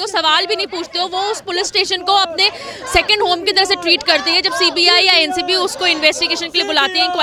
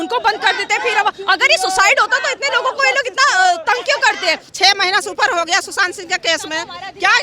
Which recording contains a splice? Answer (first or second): second